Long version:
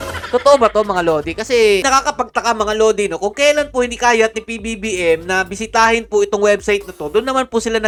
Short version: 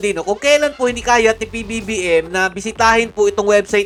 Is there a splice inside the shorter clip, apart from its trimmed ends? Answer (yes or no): no